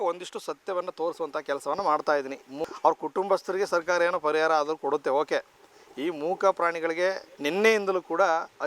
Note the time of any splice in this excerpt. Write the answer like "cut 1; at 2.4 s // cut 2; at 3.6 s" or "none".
cut 1; at 2.6 s // cut 2; at 7.3 s